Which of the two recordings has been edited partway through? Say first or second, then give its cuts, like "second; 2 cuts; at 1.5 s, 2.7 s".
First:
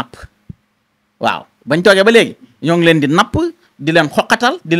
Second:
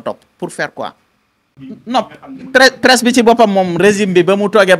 second; 1 cut; at 1.5 s